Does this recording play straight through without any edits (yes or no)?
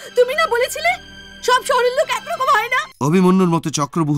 no